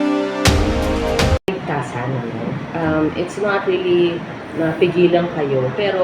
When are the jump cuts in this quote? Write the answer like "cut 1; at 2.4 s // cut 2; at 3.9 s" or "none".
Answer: cut 1; at 1.5 s

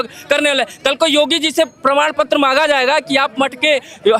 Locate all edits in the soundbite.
none

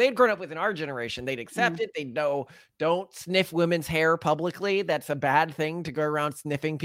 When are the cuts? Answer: none

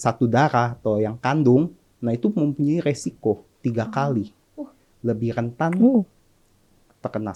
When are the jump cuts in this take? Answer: none

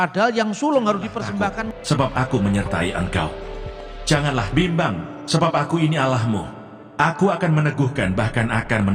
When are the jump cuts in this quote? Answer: cut 1; at 1.7 s

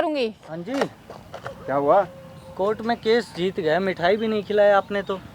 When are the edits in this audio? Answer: none

